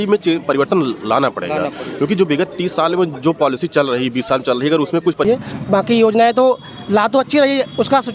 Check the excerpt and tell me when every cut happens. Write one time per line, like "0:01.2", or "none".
0:05.2

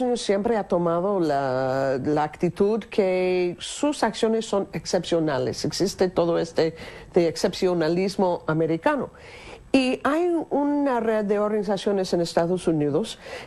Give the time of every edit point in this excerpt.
0:04.9

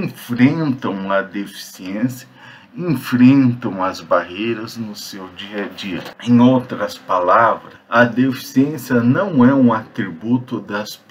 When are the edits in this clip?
0:06.1
0:07.7

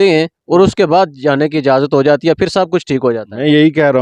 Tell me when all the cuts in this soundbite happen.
none

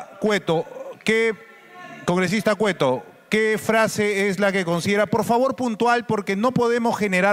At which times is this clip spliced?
none

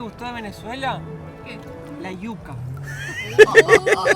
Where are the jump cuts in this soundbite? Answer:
none

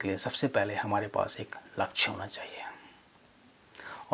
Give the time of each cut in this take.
none

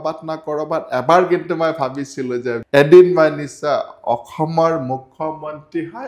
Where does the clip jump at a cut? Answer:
0:02.5

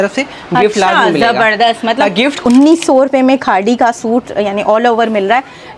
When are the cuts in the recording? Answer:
0:02.4

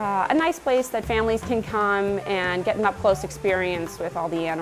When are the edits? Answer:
none

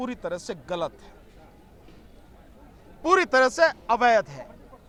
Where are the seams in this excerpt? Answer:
none

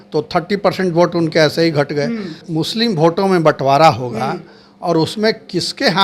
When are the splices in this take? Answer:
0:02.4

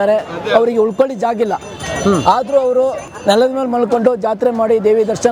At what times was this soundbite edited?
none

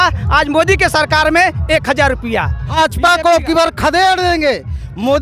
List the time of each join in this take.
0:02.8

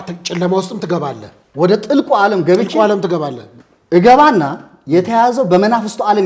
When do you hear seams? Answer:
none

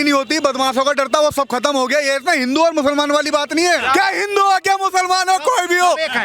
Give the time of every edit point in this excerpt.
0:03.8

